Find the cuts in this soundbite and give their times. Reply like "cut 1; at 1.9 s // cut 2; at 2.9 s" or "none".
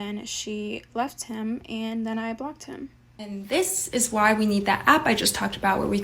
cut 1; at 3.0 s

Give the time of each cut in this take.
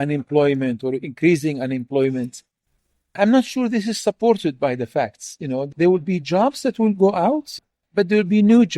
cut 1; at 7.5 s

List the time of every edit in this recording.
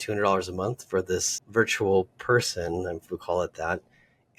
cut 1; at 1.4 s

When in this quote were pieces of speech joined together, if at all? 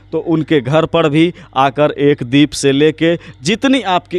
none

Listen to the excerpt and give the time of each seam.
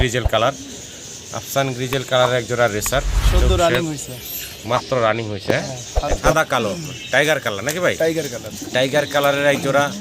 cut 1; at 6.2 s

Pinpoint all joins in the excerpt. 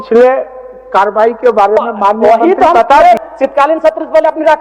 cut 1; at 3.2 s

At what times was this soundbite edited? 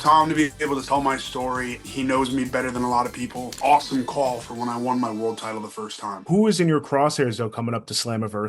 cut 1; at 0.8 s // cut 2; at 1.8 s // cut 3; at 3.5 s // cut 4; at 6.2 s

